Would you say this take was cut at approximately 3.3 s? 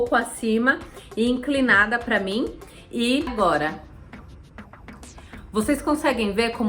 yes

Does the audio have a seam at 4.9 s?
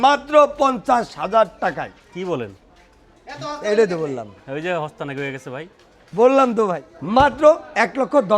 no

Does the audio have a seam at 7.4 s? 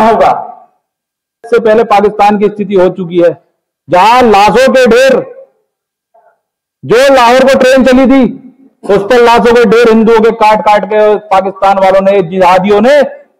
no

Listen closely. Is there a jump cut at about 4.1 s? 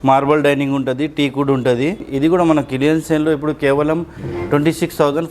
no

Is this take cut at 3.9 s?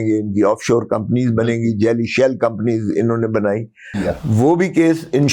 yes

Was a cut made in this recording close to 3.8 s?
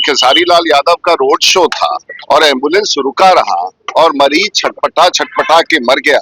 yes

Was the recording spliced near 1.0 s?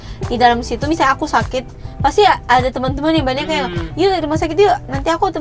no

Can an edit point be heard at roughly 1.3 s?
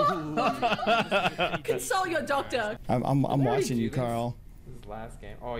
no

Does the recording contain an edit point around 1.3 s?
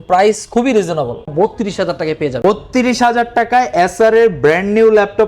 yes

